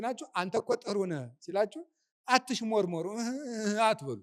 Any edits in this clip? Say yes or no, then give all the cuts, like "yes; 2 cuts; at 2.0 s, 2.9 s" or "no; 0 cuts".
no; 0 cuts